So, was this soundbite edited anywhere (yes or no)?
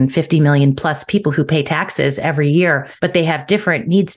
yes